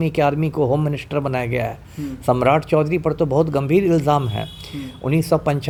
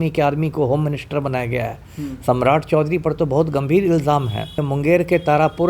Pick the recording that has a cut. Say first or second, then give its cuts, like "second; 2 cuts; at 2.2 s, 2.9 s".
second; 1 cut; at 4.6 s